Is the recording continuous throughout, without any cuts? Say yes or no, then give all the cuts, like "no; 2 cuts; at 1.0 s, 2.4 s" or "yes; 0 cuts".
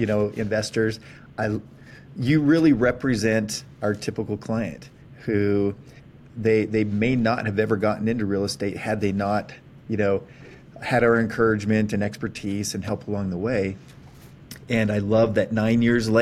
yes; 0 cuts